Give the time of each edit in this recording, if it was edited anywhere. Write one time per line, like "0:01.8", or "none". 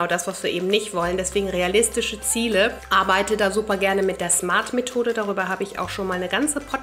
0:02.8